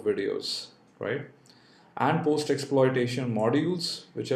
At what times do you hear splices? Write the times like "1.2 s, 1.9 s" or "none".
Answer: 0.9 s

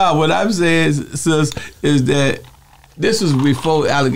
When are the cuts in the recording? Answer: none

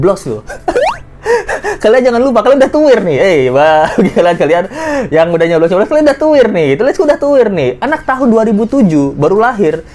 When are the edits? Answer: none

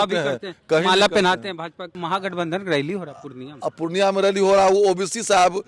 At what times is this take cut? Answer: 1.9 s

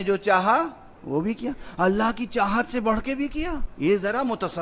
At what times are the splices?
3.6 s

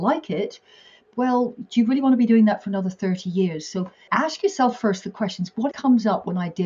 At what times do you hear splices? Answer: 1.0 s, 4.0 s, 5.7 s

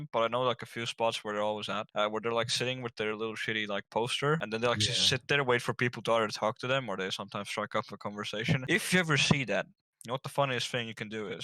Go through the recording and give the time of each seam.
1.9 s, 4.4 s, 8.6 s

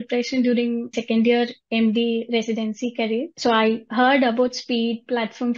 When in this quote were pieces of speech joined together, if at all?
1.0 s, 3.3 s

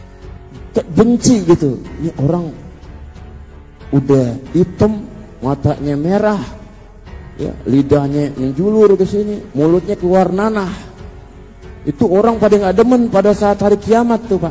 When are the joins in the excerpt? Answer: none

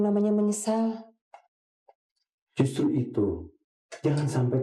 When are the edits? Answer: none

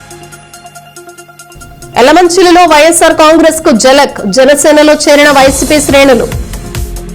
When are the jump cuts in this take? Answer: 1.3 s

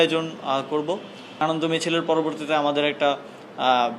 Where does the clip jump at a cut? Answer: 1.4 s

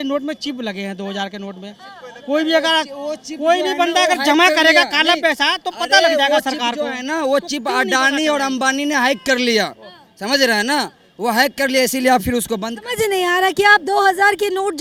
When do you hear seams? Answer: none

